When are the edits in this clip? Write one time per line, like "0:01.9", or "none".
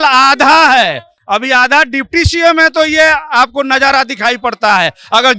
none